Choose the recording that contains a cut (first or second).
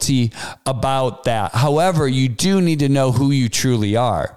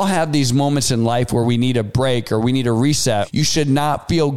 second